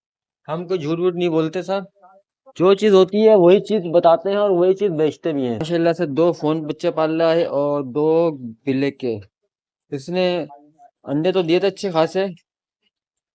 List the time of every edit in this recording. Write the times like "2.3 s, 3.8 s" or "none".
5.7 s